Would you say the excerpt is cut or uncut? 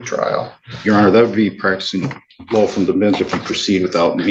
uncut